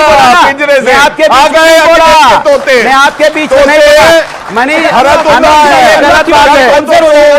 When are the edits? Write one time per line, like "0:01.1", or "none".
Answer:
none